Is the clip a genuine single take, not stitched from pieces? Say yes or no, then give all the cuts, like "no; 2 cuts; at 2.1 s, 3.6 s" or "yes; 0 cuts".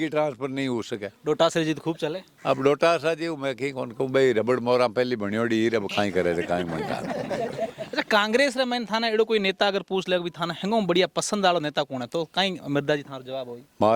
yes; 0 cuts